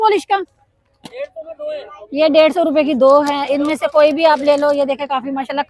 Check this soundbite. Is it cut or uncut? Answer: uncut